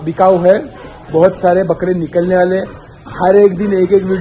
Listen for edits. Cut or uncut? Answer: uncut